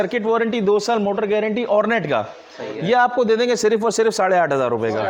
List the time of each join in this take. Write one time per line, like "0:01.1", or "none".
none